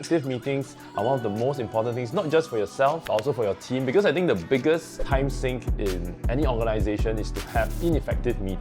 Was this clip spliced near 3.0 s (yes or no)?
yes